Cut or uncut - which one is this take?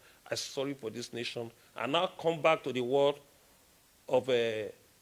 uncut